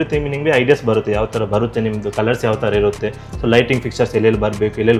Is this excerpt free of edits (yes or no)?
yes